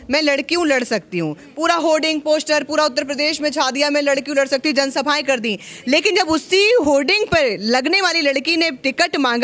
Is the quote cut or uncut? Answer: uncut